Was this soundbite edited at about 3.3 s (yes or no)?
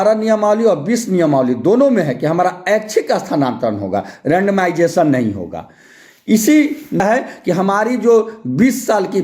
no